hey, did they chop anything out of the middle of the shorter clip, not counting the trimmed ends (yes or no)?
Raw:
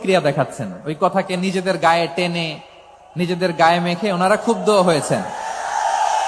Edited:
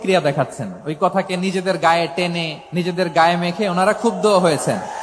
yes